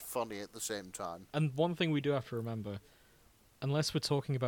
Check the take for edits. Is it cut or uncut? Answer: cut